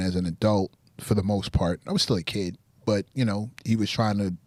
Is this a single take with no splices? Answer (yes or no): yes